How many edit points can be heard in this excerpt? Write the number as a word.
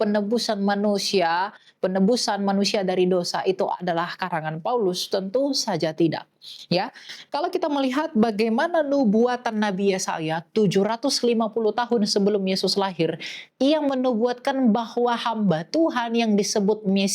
zero